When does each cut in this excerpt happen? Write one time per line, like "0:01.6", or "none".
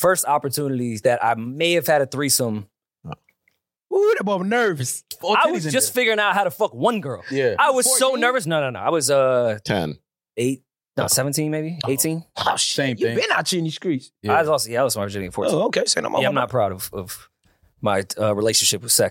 0:01.0
0:05.2